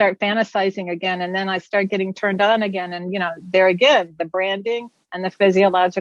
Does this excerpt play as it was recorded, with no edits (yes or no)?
yes